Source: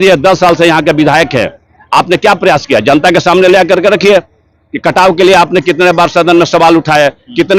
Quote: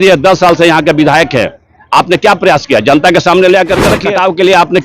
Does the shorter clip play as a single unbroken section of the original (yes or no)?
no